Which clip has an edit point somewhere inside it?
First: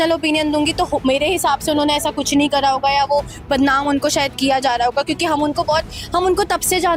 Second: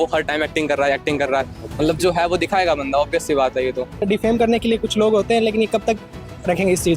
second; 1 cut; at 4.0 s

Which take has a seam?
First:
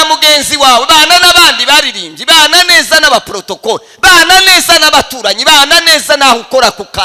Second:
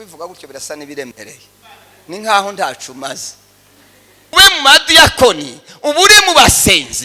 second; 1 cut; at 4.3 s

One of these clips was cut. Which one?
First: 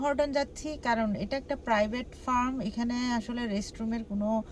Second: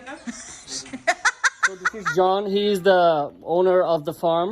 second; 1 cut; at 1.9 s

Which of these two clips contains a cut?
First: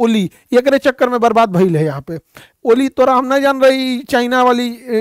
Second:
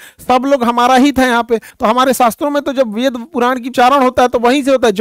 second; 2 cuts; at 1.7 s, 3.7 s

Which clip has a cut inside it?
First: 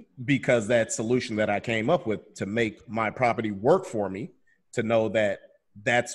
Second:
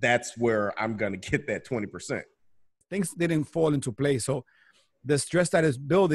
second; 1 cut; at 2.9 s

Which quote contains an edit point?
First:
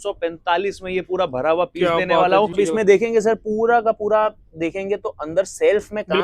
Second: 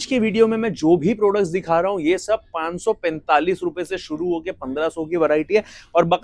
first; 1 cut; at 2.5 s

